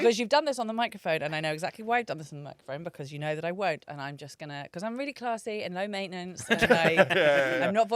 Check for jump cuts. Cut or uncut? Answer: uncut